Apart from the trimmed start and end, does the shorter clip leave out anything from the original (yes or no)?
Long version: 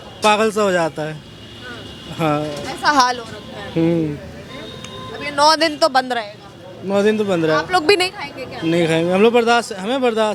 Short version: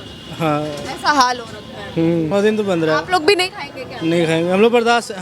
yes